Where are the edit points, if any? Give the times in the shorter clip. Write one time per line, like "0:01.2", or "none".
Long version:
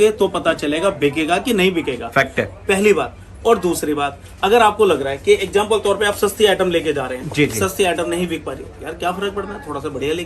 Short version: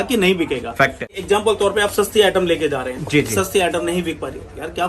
0:01.2